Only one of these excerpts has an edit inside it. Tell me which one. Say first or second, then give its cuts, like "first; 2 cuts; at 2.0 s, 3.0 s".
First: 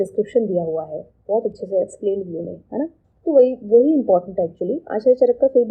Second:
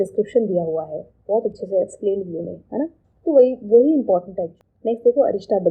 second; 1 cut; at 4.6 s